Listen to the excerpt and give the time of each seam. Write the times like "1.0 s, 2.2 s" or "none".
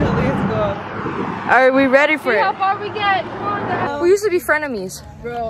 3.9 s